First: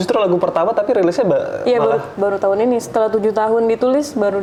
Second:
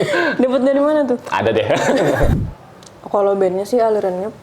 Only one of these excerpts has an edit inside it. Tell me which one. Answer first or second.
second